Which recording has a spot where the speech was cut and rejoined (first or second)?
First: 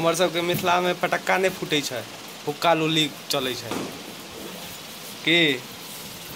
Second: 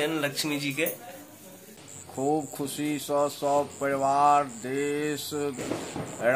second